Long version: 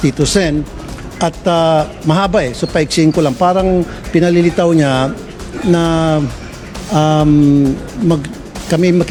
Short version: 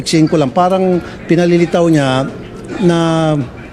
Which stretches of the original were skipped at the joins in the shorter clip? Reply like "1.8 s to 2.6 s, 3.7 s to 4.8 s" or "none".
none